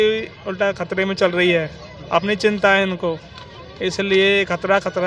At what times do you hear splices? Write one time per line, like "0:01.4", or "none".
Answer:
none